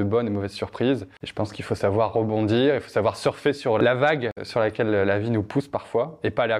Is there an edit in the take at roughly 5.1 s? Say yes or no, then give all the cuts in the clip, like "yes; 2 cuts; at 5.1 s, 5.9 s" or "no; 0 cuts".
no; 2 cuts; at 1.2 s, 3.8 s